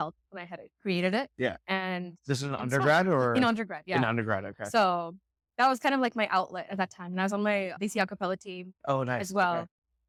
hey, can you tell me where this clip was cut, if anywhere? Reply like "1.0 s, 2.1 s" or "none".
none